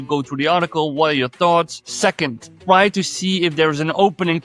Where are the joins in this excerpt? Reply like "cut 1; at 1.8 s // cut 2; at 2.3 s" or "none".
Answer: cut 1; at 2.1 s